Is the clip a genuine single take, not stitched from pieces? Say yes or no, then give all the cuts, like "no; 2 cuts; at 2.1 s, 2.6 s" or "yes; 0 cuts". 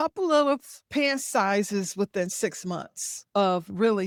yes; 0 cuts